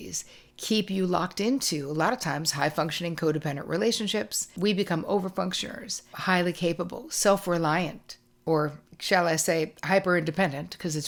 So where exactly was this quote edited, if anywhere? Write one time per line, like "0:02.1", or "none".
none